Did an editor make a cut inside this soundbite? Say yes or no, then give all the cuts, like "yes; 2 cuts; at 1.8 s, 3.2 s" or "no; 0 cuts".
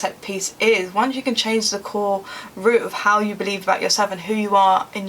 yes; 1 cut; at 4.2 s